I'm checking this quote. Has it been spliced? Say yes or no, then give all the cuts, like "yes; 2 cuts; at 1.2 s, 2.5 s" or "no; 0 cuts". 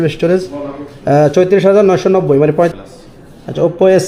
yes; 1 cut; at 2.7 s